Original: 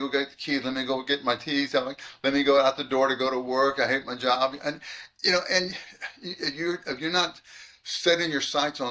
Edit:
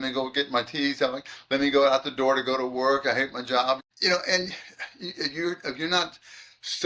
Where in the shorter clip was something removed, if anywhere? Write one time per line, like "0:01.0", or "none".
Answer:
0:03.8